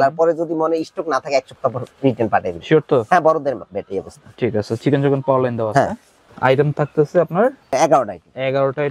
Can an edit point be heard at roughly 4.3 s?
no; 2 cuts; at 6.2 s, 7.7 s

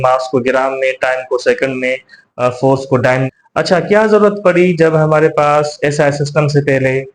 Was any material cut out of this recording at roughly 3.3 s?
yes; 1 cut; at 3.3 s

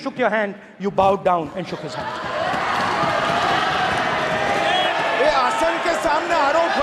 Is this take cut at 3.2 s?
no; 1 cut; at 4.9 s

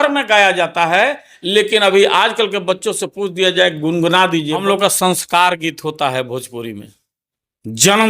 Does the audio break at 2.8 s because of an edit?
no; 1 cut; at 4.5 s

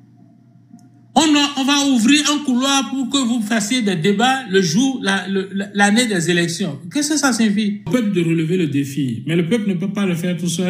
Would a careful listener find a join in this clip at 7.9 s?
yes; 1 cut; at 7.9 s

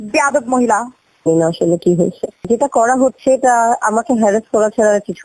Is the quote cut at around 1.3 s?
yes; 1 cut; at 1.3 s

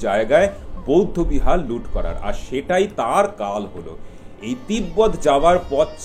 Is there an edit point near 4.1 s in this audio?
no; 0 cuts

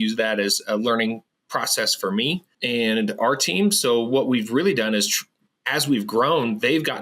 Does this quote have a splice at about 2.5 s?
yes; 1 cut; at 2.5 s

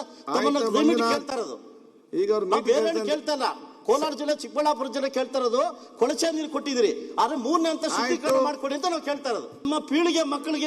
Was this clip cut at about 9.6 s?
yes; 1 cut; at 9.6 s

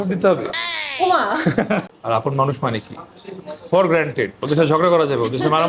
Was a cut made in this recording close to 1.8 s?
yes; 1 cut; at 1.8 s

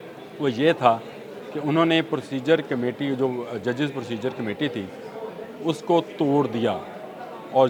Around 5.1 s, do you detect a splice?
no; 0 cuts

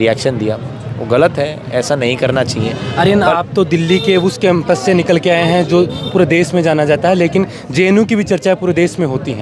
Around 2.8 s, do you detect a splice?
yes; 1 cut; at 2.8 s

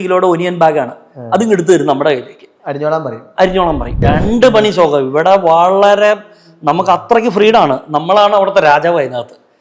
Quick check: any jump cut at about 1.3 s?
no; 1 cut; at 4.0 s

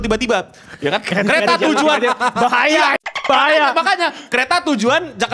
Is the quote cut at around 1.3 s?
no; 0 cuts

